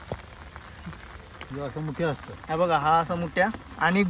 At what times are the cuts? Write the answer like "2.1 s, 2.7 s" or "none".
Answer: 1.5 s